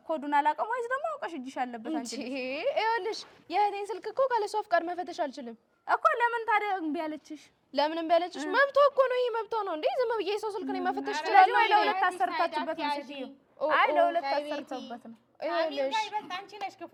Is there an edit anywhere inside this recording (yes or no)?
no